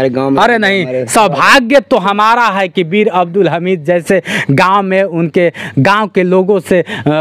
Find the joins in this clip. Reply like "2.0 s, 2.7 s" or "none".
none